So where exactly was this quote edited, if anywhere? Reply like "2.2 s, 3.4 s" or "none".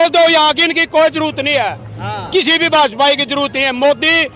none